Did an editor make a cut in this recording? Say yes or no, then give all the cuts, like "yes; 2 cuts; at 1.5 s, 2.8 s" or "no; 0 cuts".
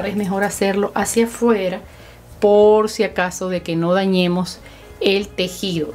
no; 0 cuts